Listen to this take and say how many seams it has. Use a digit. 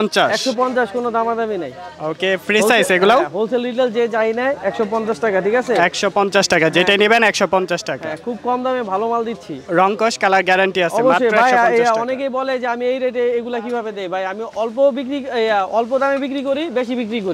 0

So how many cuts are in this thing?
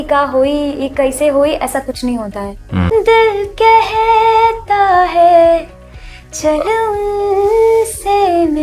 1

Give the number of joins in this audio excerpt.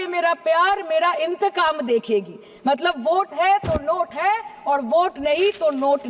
0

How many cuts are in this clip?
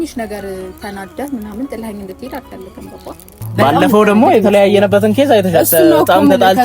1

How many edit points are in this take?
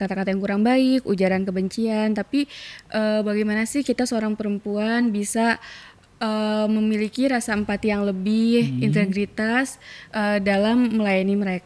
0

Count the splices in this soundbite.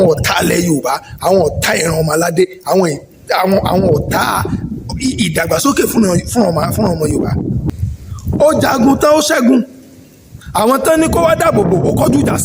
1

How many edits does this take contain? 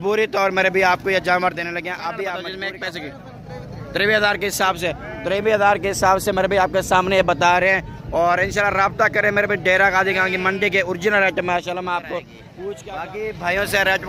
2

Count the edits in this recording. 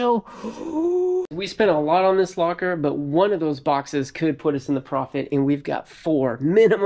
1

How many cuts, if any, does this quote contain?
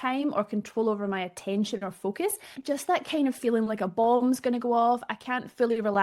1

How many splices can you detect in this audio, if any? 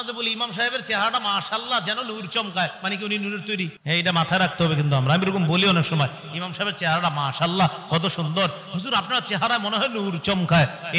1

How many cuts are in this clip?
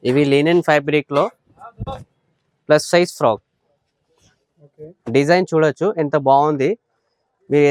0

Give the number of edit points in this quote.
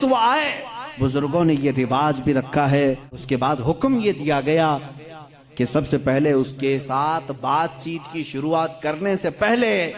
1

